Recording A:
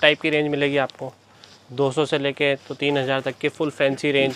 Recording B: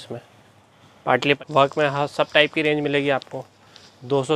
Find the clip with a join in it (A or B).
B